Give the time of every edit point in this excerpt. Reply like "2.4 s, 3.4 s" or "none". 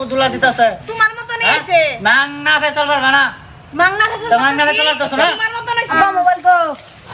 5.9 s